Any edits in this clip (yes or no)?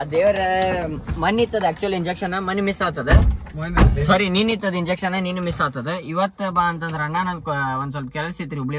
no